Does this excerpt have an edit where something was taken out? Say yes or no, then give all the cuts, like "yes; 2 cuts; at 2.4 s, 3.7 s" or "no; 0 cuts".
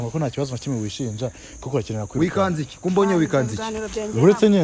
no; 0 cuts